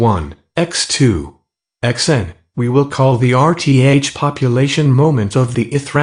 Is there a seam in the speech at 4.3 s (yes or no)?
yes